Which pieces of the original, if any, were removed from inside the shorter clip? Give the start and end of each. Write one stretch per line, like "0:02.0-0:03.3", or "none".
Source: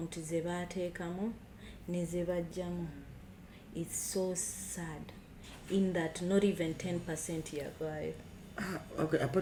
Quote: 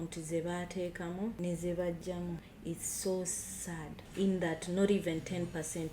0:01.4-0:01.9
0:03.0-0:03.6
0:05.1-0:05.5